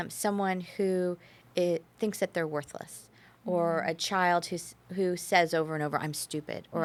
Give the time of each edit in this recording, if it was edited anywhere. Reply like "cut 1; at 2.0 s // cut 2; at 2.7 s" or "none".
none